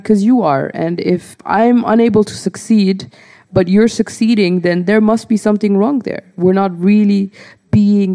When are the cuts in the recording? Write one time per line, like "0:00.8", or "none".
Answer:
0:01.4

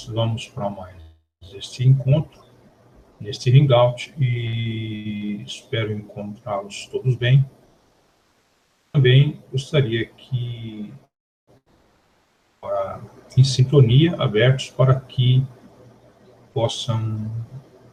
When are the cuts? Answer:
none

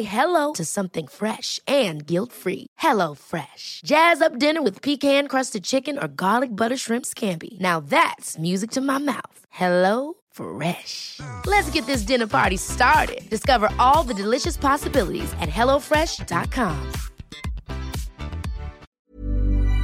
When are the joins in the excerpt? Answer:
0:18.8

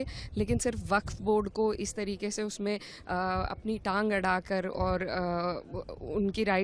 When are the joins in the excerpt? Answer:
none

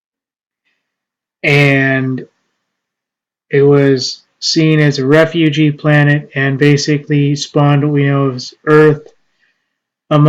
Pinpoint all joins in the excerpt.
0:08.1

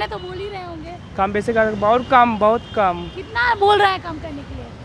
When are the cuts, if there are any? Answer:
none

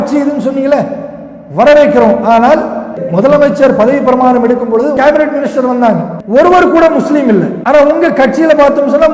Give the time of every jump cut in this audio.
0:03.0
0:05.0
0:06.1
0:07.6

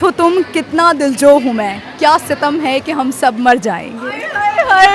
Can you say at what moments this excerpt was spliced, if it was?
none

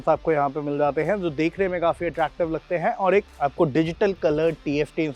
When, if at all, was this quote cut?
0:03.3

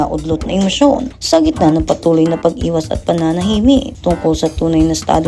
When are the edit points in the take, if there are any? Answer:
0:01.1
0:04.2

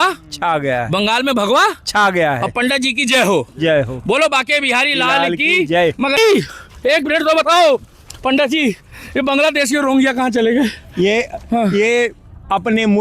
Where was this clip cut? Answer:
0:06.2

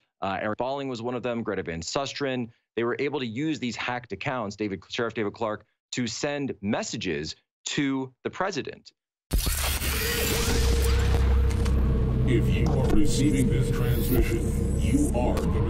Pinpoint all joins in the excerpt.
0:09.4

